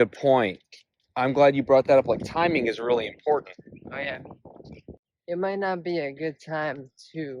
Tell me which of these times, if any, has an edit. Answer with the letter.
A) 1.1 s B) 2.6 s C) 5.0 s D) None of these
C